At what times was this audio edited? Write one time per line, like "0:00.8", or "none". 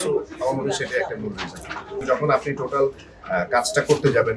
0:02.0